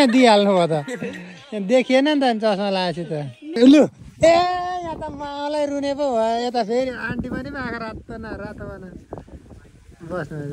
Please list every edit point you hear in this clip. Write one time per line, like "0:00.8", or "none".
0:03.6

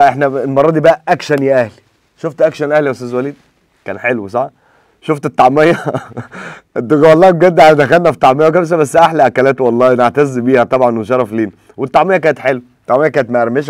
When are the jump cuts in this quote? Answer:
none

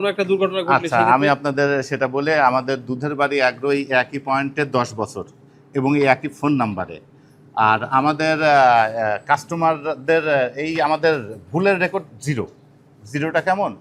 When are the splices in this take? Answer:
none

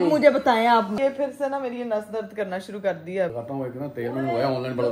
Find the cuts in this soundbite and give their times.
0:00.9
0:03.4

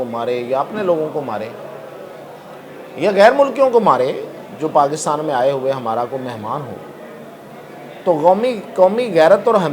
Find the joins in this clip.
none

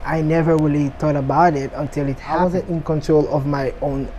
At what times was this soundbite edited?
0:02.3

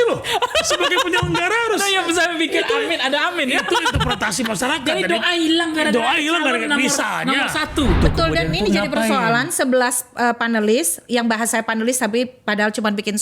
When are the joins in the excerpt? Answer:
0:08.0

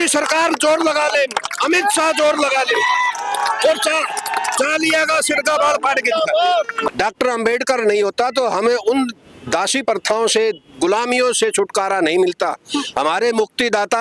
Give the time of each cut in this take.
0:06.9

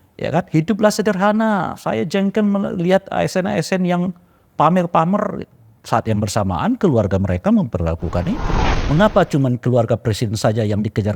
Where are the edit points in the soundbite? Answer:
0:08.7

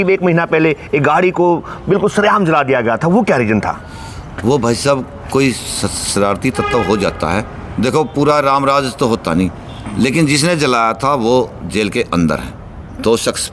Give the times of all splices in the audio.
none

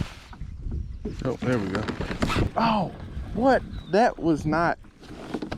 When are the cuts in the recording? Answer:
0:02.5

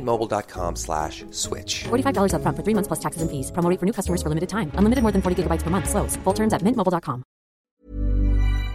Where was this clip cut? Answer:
0:07.6

